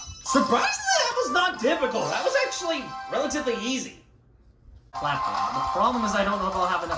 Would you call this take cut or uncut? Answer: cut